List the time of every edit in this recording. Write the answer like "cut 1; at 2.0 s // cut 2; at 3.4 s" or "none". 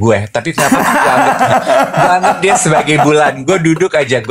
none